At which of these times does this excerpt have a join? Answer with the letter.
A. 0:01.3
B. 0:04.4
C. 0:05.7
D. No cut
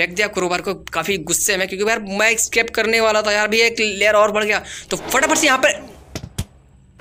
C